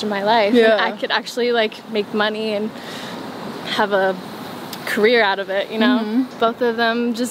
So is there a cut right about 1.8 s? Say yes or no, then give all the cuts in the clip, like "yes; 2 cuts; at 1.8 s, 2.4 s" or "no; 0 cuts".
no; 1 cut; at 6.3 s